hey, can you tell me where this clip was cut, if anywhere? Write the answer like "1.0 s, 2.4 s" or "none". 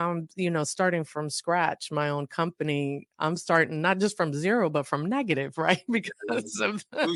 none